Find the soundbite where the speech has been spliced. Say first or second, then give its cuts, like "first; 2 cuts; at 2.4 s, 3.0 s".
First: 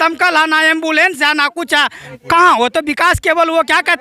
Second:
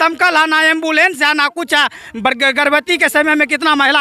first; 1 cut; at 2.0 s